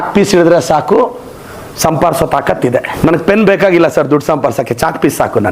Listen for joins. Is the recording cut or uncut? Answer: cut